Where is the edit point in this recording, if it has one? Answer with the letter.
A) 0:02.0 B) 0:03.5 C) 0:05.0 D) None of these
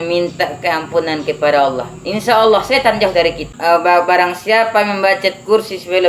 B